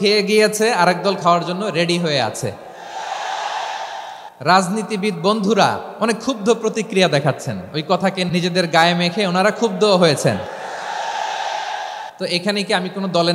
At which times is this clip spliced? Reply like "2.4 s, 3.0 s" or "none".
4.2 s, 5.9 s, 8.3 s, 12.1 s